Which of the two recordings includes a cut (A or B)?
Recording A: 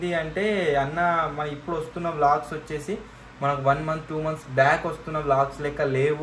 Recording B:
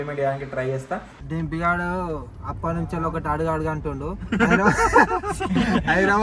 B